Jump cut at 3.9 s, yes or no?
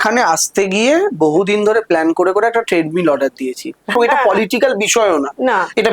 yes